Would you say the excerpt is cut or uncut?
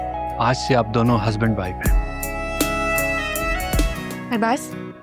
cut